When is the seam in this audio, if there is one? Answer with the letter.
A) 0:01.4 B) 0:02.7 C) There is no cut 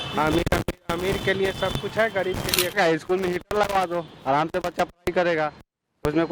B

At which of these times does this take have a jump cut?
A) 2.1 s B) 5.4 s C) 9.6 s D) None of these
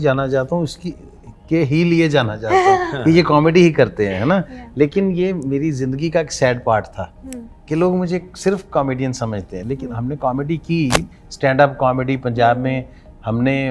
D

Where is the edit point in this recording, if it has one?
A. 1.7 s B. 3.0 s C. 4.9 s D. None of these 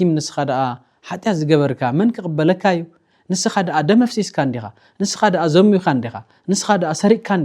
D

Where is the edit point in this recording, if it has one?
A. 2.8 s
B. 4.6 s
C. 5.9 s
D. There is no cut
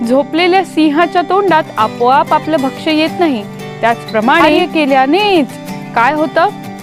B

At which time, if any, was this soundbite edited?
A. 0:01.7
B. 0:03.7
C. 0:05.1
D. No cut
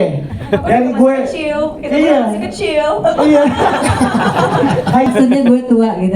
C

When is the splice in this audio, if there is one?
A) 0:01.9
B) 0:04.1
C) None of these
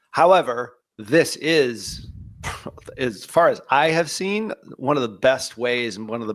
C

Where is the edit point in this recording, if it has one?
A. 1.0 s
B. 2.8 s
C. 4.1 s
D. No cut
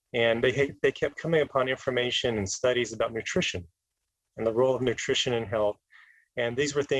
D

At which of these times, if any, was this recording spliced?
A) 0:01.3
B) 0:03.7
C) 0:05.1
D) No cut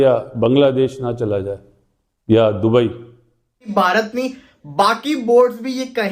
B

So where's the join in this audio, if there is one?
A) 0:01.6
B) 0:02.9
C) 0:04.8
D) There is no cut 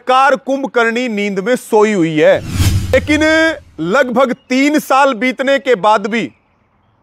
B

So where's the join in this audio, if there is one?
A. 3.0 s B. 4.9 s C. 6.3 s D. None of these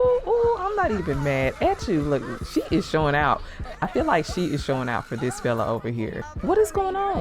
C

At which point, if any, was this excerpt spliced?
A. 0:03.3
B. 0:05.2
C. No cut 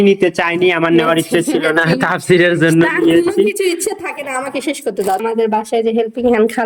B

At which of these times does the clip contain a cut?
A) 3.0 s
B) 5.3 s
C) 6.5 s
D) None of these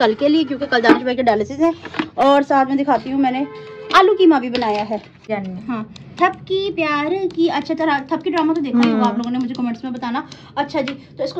B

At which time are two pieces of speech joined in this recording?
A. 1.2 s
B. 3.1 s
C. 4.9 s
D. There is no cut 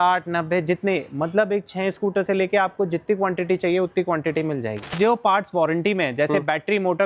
C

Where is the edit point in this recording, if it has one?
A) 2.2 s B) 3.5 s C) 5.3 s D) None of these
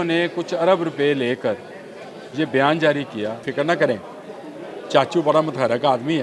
B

